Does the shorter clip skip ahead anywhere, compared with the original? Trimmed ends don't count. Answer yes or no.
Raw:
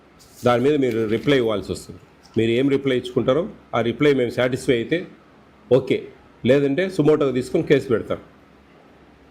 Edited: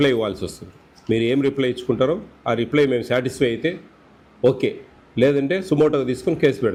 no